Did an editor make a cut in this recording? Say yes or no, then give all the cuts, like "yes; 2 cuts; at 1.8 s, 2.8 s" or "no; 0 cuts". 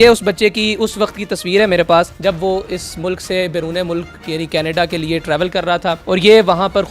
yes; 2 cuts; at 2.1 s, 6.0 s